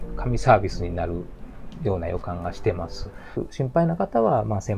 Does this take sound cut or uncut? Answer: cut